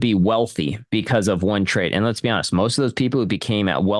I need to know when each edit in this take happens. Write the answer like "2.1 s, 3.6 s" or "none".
none